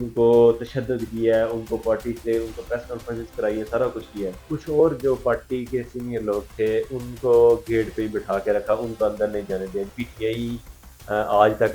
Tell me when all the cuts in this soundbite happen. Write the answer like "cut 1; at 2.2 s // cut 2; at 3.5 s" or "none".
cut 1; at 4.4 s // cut 2; at 9.9 s